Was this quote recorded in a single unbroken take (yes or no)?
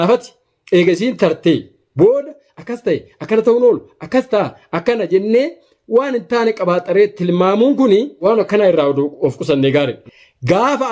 no